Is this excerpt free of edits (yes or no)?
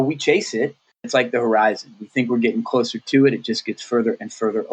no